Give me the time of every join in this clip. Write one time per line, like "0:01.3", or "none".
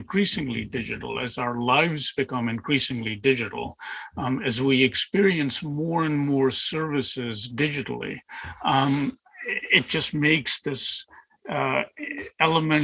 none